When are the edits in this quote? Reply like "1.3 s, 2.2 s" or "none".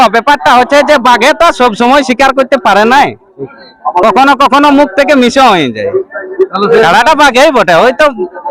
none